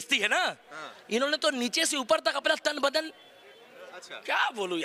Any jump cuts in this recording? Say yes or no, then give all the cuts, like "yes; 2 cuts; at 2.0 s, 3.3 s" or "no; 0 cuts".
no; 0 cuts